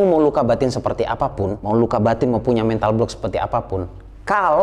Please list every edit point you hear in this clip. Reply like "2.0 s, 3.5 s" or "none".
1.6 s

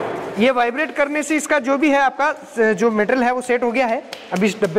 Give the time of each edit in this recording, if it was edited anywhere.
none

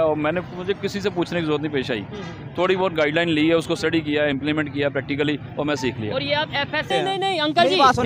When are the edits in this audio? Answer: 6.9 s

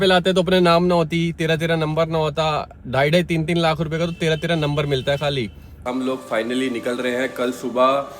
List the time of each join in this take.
5.8 s

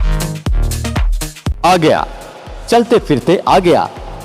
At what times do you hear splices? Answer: 1.7 s

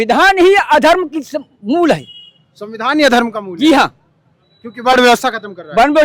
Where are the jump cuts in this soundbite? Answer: none

